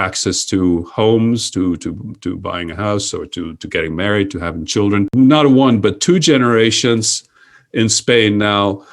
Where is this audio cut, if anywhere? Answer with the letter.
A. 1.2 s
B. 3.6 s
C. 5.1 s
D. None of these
C